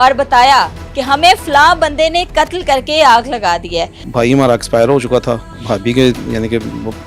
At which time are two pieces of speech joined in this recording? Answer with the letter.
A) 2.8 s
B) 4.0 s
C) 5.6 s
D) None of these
B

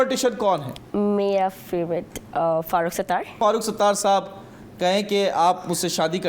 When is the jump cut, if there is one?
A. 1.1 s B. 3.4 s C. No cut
B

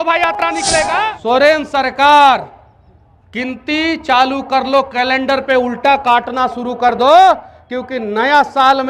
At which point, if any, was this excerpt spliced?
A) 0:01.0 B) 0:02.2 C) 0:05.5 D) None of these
A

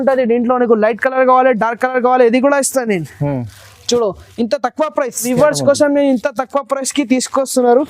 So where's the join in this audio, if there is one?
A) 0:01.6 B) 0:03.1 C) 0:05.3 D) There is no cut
C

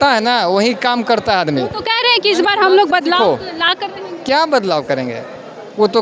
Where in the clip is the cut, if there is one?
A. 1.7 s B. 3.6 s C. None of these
C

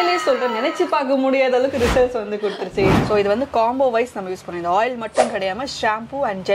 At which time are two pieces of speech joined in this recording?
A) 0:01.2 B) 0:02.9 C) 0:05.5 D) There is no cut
B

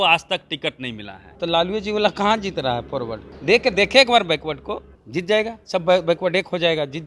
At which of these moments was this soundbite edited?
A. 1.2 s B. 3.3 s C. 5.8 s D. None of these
A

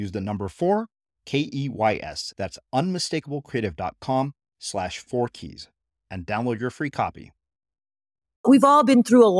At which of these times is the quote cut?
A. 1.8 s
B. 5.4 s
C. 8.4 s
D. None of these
C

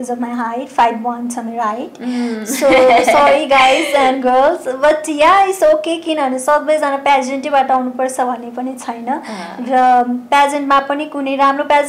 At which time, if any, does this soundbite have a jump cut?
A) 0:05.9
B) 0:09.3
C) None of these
C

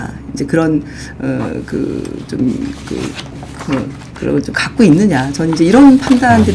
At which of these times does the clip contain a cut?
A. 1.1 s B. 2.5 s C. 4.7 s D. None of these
D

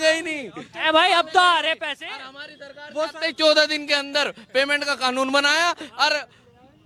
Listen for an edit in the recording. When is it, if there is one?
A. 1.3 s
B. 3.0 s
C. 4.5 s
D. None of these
D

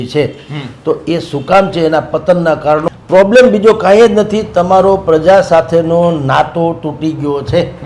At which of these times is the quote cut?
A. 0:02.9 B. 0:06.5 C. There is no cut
A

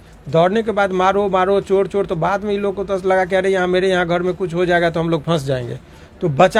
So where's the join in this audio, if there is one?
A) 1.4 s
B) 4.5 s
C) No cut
C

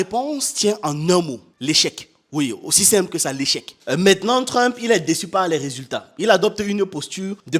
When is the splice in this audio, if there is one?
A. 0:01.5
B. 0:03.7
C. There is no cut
B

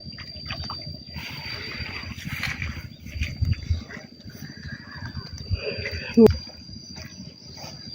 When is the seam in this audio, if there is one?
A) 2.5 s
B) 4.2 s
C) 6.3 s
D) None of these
C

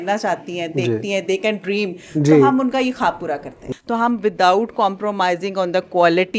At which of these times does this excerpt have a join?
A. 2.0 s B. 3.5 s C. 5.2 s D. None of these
B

